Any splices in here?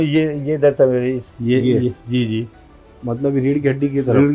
yes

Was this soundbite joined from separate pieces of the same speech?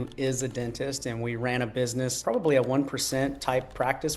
yes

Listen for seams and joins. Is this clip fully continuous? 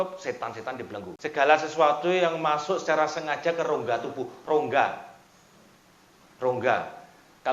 no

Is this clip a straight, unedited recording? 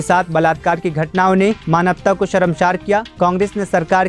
yes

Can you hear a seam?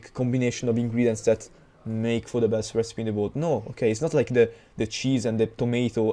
no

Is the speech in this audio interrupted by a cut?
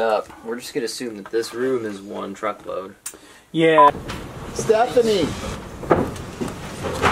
yes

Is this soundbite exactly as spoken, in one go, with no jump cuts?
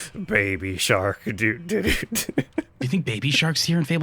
no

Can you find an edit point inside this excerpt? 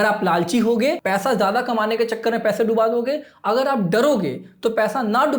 yes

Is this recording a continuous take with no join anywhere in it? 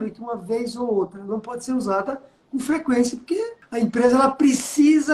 no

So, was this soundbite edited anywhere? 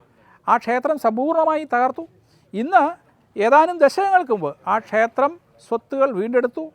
no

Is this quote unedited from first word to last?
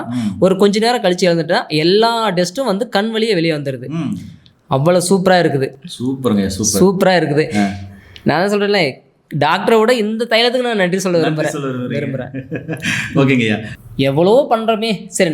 yes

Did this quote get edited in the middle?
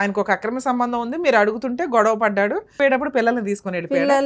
yes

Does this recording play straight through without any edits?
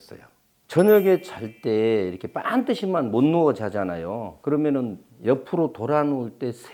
yes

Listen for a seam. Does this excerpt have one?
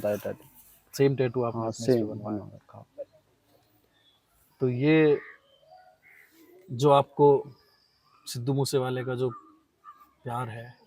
no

